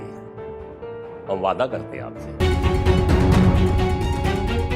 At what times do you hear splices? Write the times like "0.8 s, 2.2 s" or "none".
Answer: 2.3 s